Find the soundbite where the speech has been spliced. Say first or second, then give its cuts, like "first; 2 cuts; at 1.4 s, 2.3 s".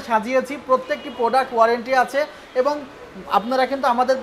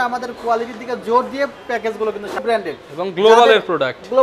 second; 1 cut; at 2.4 s